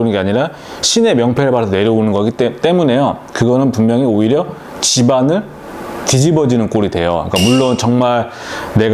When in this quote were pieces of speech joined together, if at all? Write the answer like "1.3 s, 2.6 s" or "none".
none